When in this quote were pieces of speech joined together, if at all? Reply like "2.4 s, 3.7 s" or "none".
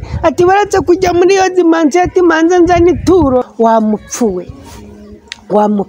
3.5 s